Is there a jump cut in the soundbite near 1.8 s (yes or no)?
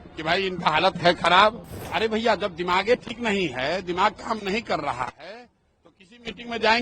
yes